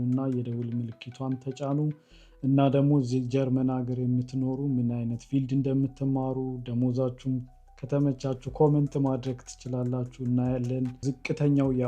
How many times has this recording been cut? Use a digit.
1